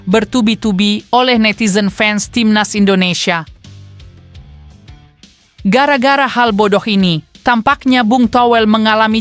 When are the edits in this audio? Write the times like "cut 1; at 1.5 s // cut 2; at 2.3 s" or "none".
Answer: cut 1; at 3.7 s // cut 2; at 5.6 s